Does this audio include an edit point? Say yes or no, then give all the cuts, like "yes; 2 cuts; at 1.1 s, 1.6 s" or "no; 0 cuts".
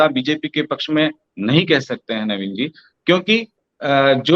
no; 0 cuts